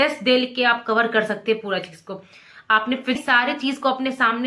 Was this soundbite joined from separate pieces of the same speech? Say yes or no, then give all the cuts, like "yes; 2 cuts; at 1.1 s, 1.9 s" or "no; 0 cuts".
yes; 1 cut; at 3.2 s